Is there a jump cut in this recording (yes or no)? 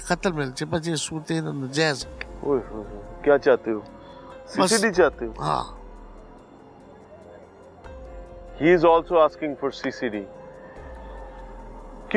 no